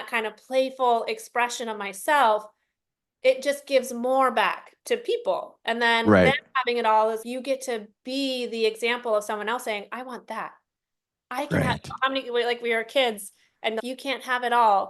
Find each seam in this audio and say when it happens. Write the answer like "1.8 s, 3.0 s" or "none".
4.8 s, 7.2 s, 13.8 s